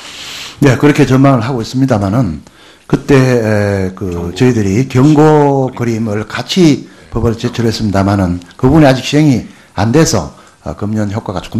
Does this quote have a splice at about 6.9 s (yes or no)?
no